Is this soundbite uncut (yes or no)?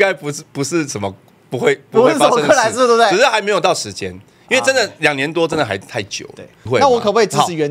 no